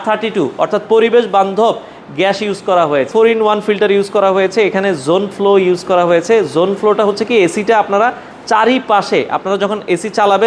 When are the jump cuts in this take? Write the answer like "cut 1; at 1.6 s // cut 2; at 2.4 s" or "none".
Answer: cut 1; at 3.1 s